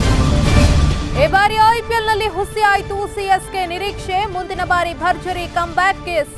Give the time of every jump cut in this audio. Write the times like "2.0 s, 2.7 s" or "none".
none